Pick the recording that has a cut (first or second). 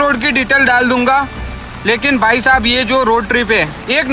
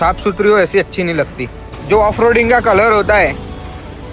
second